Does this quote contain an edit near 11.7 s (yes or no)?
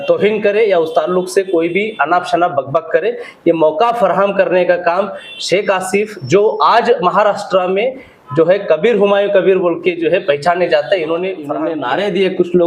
yes